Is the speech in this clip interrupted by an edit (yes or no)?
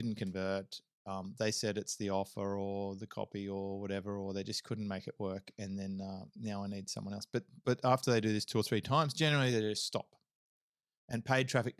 no